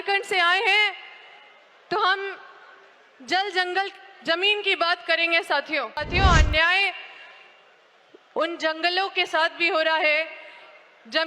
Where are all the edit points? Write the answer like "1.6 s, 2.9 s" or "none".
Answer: 6.1 s